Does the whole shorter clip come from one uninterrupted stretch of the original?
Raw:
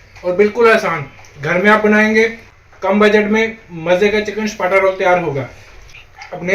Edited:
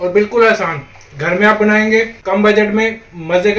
no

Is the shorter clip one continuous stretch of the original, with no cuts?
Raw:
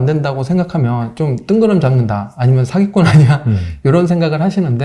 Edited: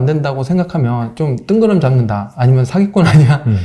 yes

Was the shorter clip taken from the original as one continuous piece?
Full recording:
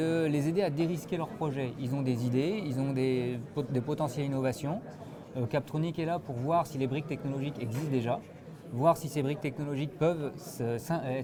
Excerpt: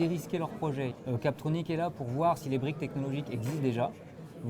no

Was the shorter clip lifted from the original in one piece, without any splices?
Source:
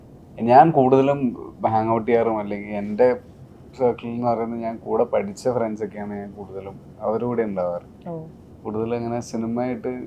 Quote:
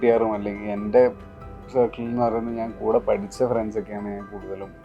yes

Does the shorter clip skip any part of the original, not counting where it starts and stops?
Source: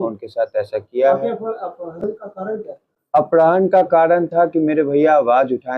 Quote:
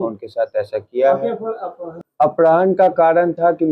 yes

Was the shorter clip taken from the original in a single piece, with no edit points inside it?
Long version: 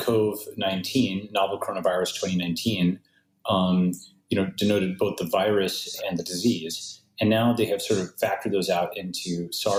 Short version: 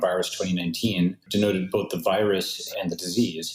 no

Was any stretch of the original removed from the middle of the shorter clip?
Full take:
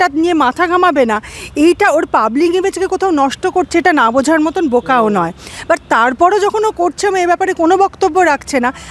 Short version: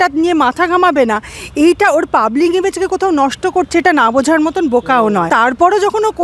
yes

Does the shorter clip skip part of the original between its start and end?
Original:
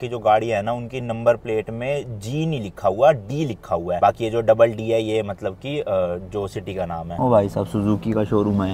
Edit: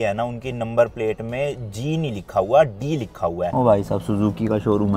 yes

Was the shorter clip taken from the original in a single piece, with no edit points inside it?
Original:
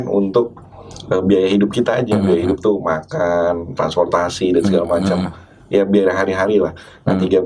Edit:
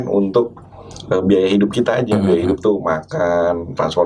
yes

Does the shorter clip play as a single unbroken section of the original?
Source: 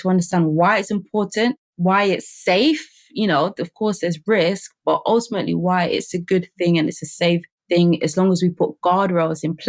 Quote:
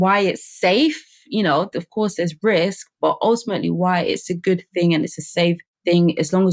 yes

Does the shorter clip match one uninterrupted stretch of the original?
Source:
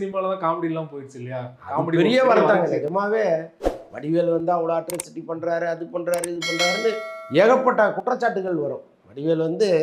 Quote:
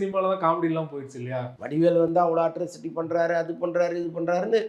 no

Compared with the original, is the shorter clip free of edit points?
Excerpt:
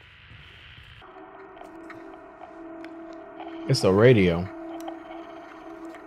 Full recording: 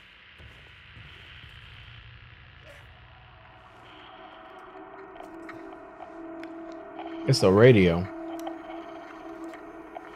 no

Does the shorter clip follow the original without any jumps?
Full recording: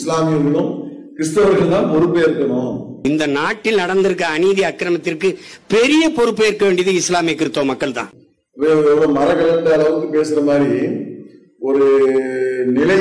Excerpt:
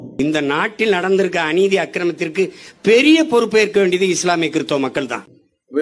yes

